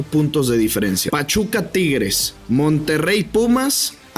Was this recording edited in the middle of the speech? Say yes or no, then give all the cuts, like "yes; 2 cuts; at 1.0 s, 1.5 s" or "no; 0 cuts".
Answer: yes; 2 cuts; at 1.0 s, 2.3 s